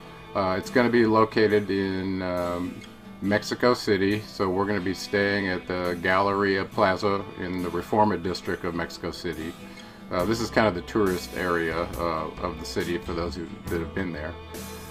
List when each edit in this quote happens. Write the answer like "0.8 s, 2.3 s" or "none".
none